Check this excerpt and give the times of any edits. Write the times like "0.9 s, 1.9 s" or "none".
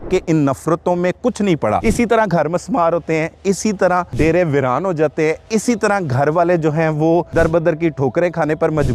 1.8 s, 4.1 s, 7.3 s